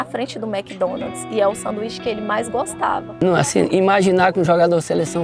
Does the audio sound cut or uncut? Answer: cut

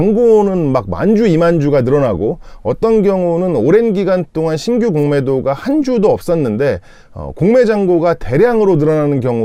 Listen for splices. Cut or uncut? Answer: uncut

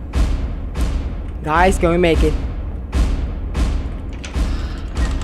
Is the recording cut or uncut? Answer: uncut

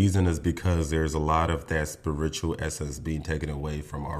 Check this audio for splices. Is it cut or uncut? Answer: uncut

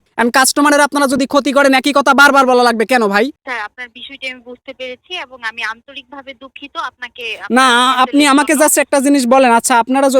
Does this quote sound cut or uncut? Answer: cut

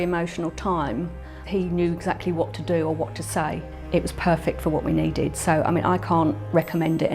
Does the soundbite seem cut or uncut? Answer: cut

